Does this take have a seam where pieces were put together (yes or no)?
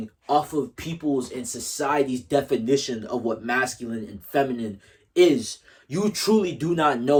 no